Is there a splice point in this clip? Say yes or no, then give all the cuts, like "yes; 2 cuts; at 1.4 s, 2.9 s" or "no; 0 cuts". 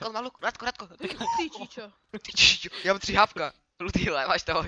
no; 0 cuts